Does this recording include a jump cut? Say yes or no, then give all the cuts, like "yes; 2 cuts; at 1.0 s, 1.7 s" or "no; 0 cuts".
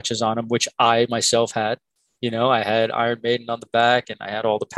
no; 0 cuts